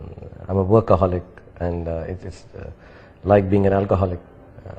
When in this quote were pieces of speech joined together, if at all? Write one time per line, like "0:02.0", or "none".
none